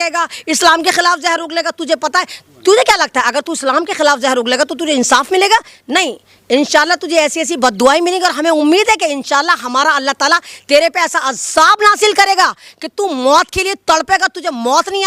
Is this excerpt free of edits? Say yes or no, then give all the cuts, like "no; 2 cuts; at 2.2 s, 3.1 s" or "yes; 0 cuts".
yes; 0 cuts